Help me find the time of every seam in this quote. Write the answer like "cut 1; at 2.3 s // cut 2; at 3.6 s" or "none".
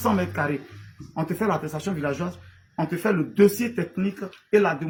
none